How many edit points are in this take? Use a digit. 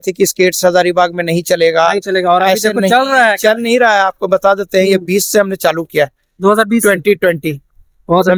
0